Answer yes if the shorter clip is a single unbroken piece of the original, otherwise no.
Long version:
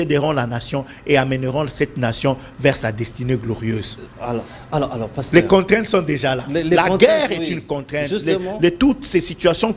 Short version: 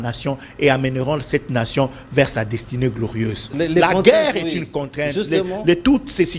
no